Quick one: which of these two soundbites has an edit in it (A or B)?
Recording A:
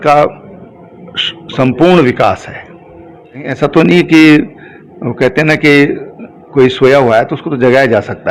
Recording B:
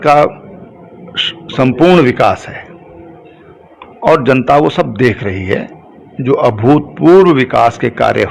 A